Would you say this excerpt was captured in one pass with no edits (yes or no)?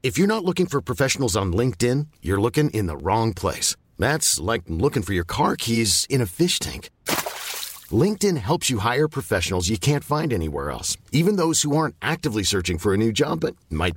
yes